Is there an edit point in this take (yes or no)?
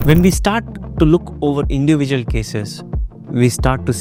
no